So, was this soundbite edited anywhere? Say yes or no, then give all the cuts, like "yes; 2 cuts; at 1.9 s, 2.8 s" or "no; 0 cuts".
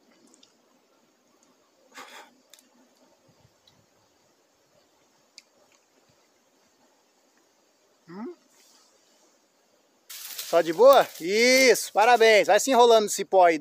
yes; 1 cut; at 10.2 s